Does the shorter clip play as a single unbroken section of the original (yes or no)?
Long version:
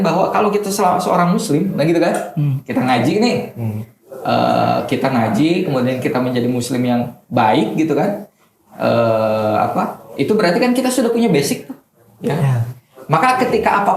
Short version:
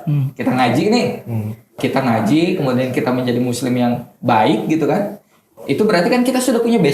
no